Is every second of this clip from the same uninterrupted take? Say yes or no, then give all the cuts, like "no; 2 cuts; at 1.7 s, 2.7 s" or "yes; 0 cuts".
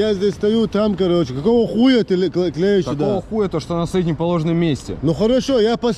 yes; 0 cuts